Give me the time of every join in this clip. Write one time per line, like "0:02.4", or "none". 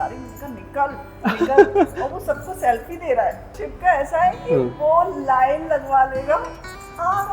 0:03.6